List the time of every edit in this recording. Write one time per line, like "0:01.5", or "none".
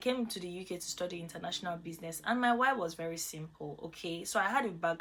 none